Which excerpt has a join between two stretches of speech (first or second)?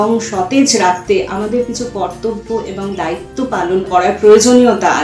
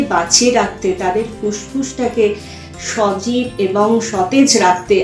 first